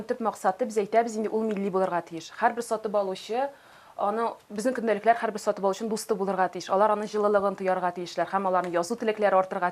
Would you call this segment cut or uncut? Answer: uncut